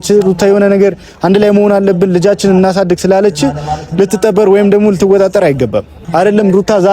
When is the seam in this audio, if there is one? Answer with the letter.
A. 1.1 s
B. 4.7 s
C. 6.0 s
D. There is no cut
C